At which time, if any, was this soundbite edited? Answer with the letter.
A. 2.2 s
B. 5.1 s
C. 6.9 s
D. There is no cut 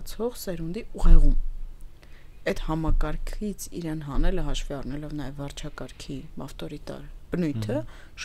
D